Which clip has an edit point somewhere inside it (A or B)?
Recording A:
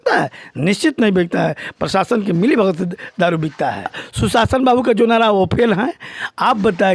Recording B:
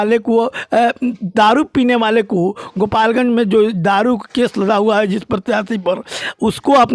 A